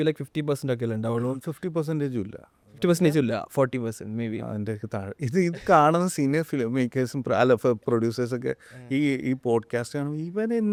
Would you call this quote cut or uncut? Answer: uncut